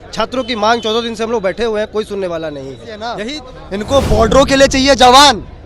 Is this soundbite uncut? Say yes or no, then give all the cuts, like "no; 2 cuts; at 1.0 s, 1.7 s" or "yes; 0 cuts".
no; 1 cut; at 3.2 s